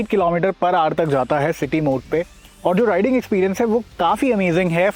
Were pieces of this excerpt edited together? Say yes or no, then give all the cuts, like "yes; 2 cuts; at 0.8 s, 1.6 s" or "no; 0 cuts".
no; 0 cuts